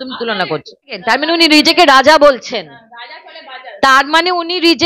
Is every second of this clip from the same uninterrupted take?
no; 1 cut; at 0.9 s

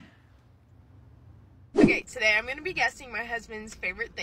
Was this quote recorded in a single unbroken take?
no; 1 cut; at 1.7 s

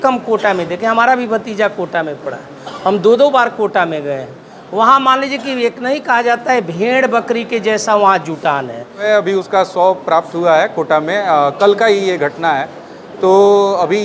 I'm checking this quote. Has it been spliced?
yes; 1 cut; at 9.0 s

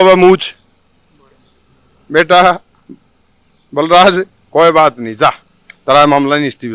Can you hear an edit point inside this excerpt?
no; 0 cuts

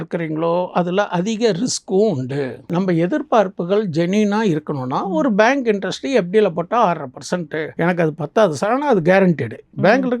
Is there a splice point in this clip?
yes; 2 cuts; at 2.6 s, 7.7 s

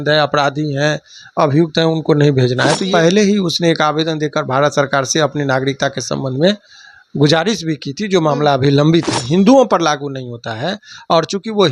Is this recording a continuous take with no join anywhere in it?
no; 2 cuts; at 2.8 s, 9.3 s

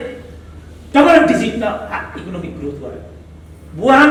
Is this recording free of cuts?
yes; 0 cuts

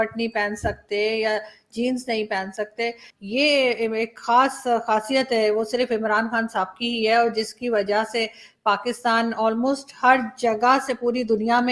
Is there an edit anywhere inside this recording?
yes; 1 cut; at 3.1 s

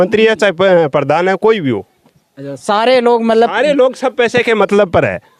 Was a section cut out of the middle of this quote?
no; 0 cuts

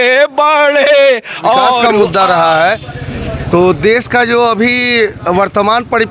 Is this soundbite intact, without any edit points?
no; 1 cut; at 1.8 s

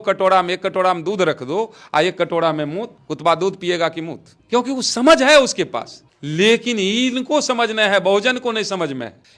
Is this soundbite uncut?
yes; 0 cuts

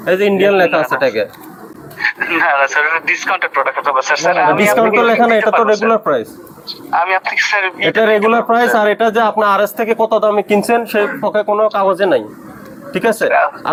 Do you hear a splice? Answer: no; 0 cuts

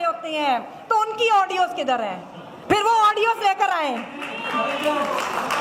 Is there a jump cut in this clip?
no; 0 cuts

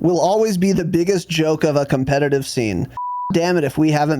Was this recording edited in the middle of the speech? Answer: yes; 1 cut; at 3.3 s

